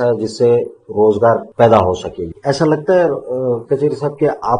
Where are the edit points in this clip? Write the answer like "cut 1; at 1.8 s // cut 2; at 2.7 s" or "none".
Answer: cut 1; at 1.5 s // cut 2; at 2.3 s

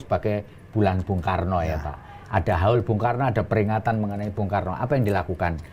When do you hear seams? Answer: none

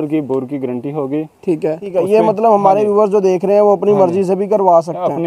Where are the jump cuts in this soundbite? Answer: cut 1; at 1.9 s

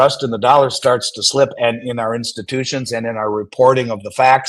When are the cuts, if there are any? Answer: none

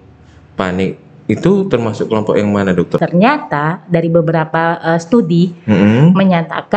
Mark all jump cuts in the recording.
cut 1; at 3.0 s

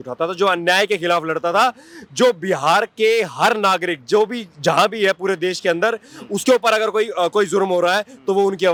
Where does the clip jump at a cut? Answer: none

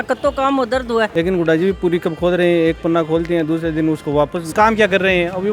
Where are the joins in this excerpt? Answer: cut 1; at 1.1 s // cut 2; at 4.5 s

